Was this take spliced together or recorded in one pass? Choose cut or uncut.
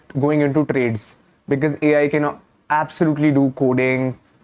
uncut